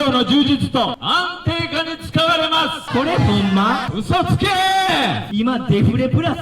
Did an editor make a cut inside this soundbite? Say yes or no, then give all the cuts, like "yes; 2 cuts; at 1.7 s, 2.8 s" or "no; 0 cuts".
yes; 4 cuts; at 1.0 s, 2.8 s, 3.9 s, 5.2 s